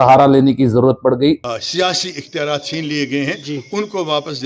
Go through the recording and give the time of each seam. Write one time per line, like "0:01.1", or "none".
0:01.4